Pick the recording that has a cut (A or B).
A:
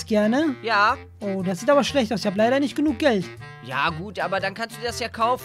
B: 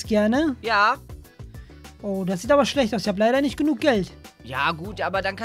A